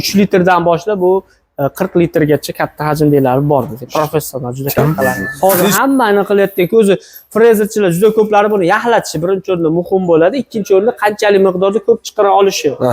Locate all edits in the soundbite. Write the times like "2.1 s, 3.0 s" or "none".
5.3 s